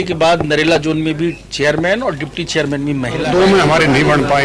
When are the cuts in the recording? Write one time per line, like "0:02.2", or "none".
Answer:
0:03.2

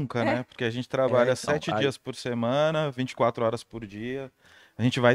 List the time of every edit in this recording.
none

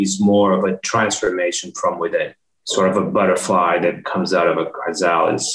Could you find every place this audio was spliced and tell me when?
none

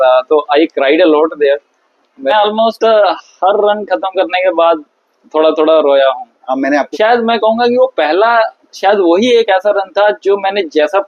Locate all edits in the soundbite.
0:02.3
0:06.9

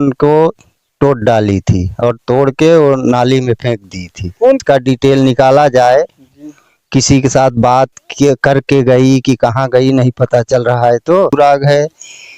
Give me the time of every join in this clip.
0:04.6
0:11.3

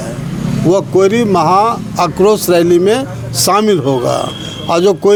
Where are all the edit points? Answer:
none

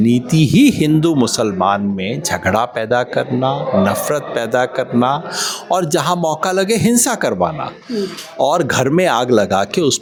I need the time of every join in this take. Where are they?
none

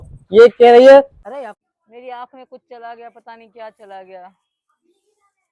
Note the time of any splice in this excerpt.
0:01.2

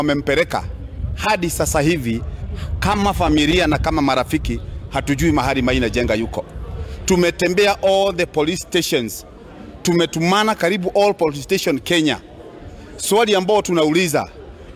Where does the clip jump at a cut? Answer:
none

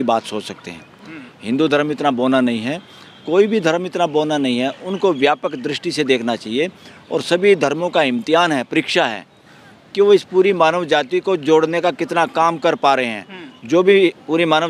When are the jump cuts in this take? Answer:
none

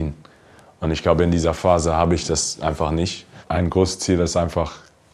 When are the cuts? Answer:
0:03.4

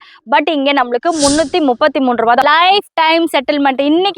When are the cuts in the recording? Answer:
0:02.4

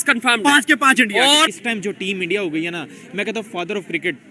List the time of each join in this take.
0:01.5

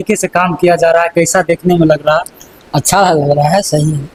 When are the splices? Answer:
none

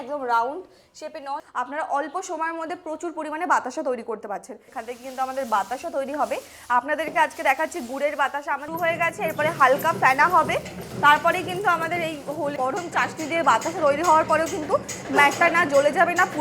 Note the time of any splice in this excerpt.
0:01.4
0:04.7
0:08.7
0:12.6

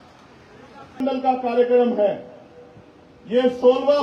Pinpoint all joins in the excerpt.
0:01.0

